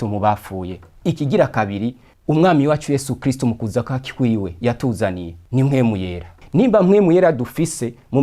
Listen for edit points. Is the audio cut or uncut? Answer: cut